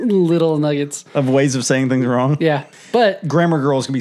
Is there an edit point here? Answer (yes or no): yes